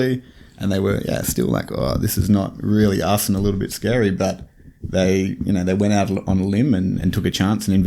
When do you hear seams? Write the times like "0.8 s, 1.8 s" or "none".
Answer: none